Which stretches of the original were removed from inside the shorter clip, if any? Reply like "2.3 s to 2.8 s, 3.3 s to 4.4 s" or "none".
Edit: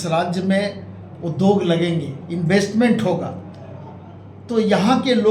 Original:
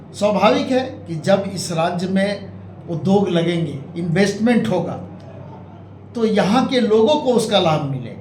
none

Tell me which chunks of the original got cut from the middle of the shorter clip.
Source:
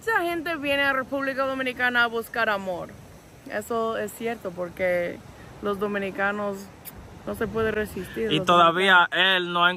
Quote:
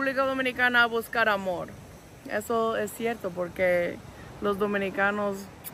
none

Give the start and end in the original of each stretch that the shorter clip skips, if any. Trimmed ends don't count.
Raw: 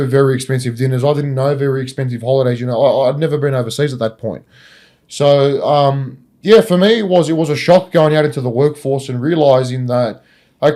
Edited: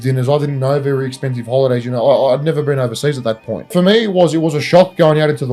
4.5 s to 6.7 s

